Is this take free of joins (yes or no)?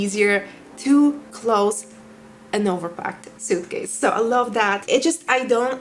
yes